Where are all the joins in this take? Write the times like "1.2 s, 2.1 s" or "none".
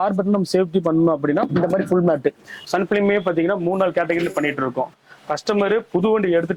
2.6 s, 5.0 s